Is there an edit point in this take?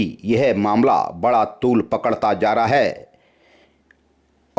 no; 0 cuts

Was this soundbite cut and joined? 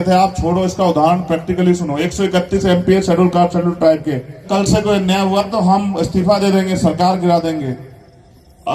yes; 1 cut; at 4.5 s

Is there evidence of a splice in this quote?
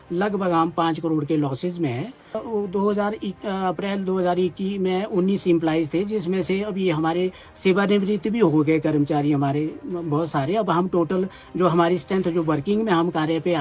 yes; 1 cut; at 2.4 s

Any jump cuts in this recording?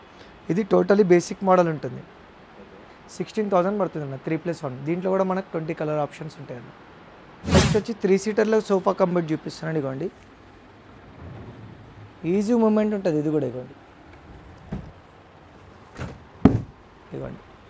no; 0 cuts

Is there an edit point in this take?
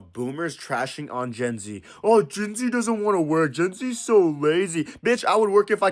no; 0 cuts

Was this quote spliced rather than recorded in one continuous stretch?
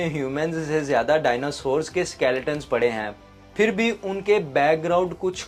no; 0 cuts

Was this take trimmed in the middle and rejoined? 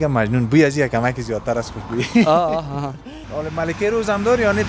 yes; 1 cut; at 3.2 s

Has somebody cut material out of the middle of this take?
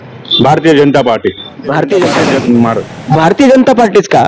yes; 1 cut; at 2.2 s

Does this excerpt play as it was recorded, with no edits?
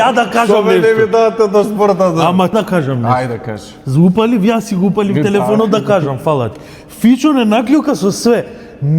no; 1 cut; at 2.5 s

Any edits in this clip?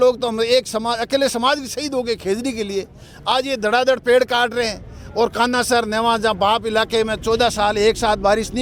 no; 0 cuts

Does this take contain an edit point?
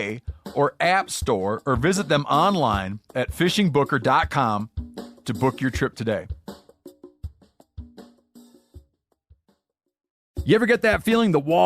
yes; 1 cut; at 10.2 s

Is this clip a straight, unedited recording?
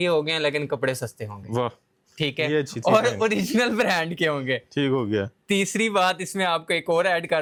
yes; 0 cuts

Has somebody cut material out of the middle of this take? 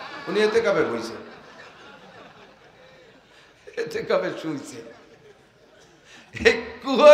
no; 0 cuts

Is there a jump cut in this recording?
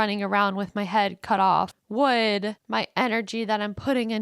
yes; 2 cuts; at 1.8 s, 2.6 s

